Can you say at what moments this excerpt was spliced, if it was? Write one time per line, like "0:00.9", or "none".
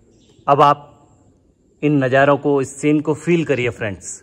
none